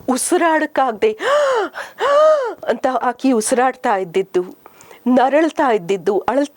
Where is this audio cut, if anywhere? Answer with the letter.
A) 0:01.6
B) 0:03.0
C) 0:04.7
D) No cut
B